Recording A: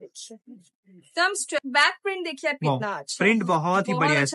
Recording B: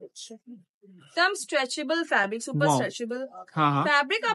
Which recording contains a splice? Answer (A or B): A